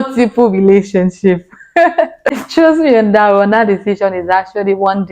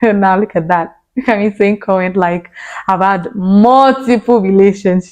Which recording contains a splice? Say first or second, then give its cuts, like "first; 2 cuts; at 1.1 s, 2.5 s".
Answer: first; 1 cut; at 2.4 s